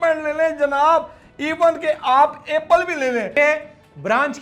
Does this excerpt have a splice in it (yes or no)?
yes